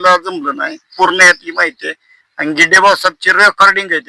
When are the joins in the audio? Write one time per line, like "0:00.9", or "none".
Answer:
0:00.9